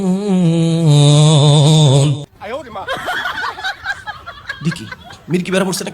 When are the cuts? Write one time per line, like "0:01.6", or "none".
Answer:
0:02.3